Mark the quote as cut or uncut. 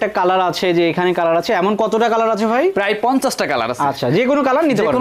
uncut